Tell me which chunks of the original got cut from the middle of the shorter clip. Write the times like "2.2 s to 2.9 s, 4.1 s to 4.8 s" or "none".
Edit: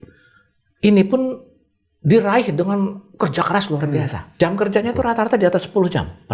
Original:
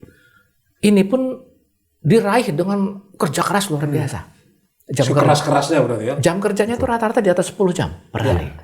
4.3 s to 6.2 s